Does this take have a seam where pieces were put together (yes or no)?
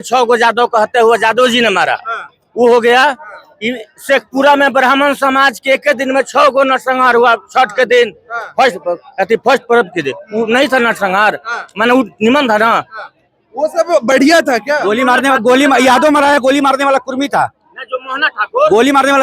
no